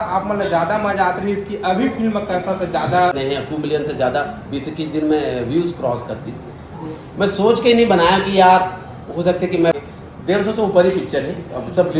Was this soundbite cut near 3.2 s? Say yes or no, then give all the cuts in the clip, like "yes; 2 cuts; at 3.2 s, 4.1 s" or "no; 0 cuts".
yes; 2 cuts; at 3.2 s, 9.8 s